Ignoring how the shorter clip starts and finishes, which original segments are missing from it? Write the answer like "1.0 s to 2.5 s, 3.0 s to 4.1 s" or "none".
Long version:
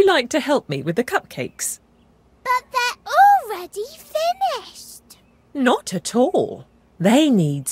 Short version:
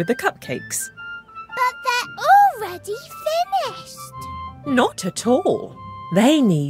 none